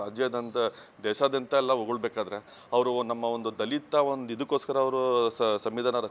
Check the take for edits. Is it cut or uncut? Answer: uncut